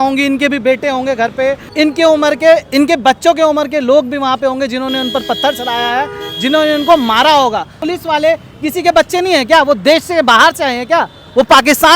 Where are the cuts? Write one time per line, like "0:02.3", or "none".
0:01.7
0:07.8